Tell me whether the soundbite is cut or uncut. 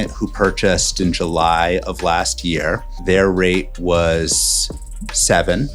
cut